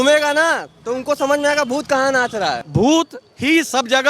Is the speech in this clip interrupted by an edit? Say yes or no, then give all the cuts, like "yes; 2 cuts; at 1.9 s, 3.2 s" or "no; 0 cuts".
yes; 1 cut; at 2.6 s